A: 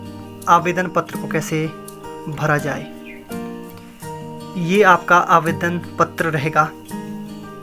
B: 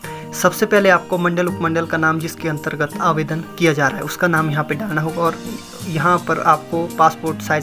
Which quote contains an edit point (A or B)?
A